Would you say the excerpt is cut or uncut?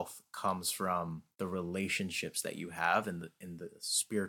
cut